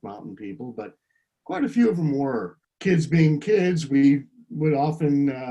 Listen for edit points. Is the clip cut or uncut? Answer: cut